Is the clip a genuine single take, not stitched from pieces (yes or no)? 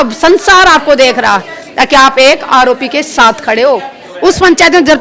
no